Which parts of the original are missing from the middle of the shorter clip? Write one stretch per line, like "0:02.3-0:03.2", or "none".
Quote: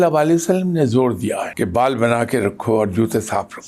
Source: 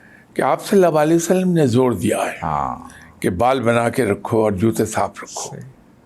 0:02.3-0:03.1

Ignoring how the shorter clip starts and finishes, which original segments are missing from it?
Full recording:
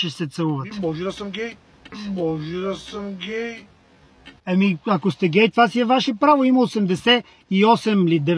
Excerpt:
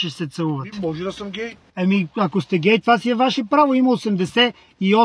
0:01.6-0:04.3

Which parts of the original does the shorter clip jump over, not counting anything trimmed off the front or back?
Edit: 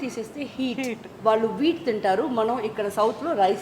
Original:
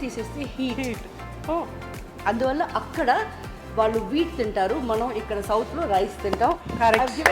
0:01.0-0:03.6

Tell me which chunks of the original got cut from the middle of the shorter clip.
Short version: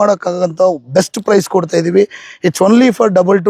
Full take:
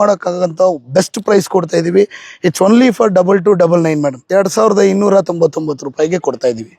none

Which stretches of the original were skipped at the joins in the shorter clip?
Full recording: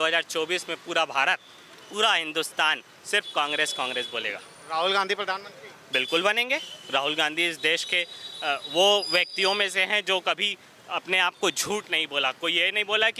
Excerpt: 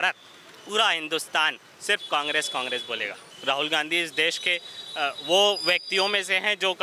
0:04.5-0:06.7

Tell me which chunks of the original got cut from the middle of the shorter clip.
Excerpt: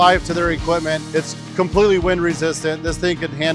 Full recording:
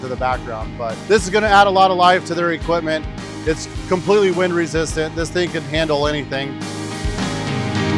0:03.0-0:03.4

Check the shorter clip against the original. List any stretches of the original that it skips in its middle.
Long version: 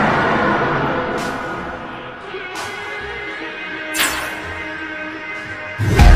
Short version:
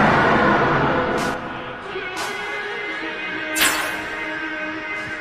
0:01.3-0:01.7

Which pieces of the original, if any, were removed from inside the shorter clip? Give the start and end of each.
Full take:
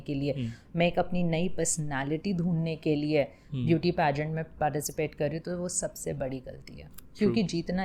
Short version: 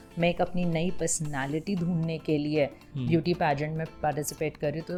none

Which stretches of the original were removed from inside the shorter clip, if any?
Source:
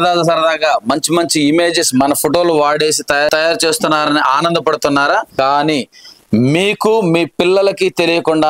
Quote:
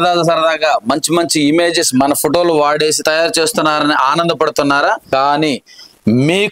0:03.0-0:03.3

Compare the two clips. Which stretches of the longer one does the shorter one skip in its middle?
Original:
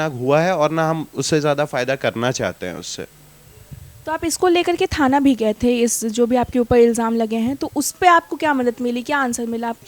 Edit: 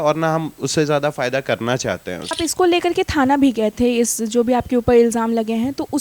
0:02.9-0:04.2

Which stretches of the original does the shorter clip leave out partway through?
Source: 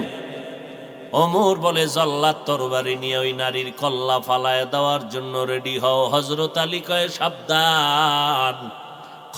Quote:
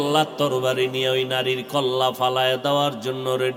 none

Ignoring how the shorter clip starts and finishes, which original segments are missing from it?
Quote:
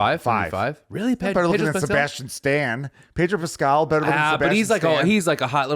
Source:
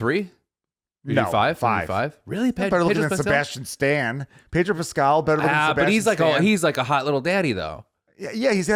none

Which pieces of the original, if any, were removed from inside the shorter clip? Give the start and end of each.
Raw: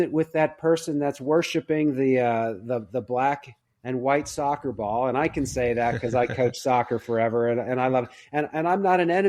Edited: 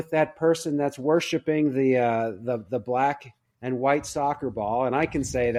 none

